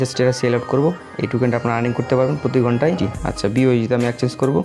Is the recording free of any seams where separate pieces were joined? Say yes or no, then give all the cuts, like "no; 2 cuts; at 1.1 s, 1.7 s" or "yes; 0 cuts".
no; 1 cut; at 3.1 s